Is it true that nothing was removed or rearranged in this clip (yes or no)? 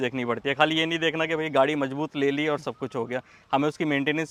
yes